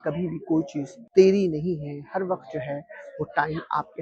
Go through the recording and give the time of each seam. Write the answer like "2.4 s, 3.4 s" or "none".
1.0 s